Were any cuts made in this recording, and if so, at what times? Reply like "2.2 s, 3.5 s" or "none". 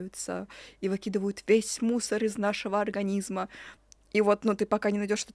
3.6 s